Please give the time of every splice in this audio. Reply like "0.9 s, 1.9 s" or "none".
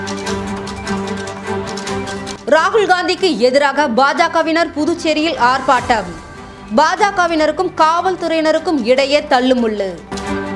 2.3 s